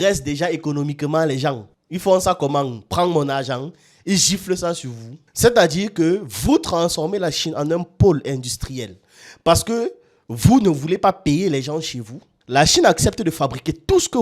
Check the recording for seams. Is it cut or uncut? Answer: uncut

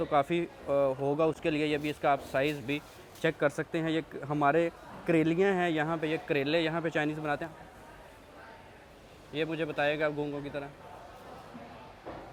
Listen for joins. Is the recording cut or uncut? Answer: uncut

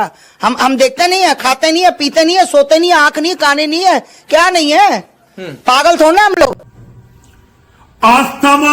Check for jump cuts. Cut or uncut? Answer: cut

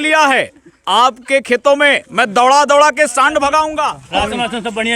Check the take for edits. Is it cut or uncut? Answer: cut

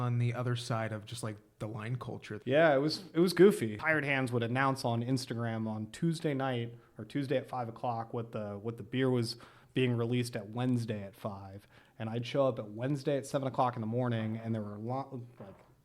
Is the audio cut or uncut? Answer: cut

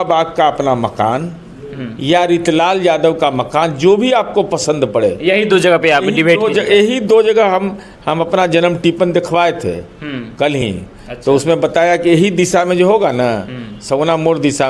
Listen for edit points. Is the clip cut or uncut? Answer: uncut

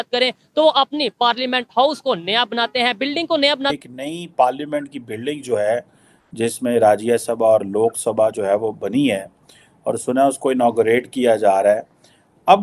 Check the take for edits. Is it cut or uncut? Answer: cut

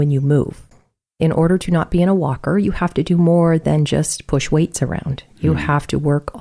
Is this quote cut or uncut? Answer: cut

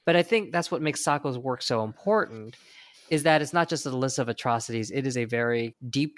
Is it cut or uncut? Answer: uncut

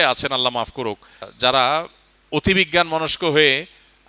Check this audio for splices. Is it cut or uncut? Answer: uncut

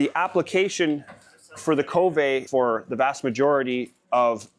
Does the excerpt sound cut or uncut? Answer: cut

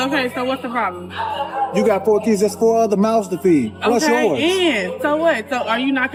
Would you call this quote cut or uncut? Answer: uncut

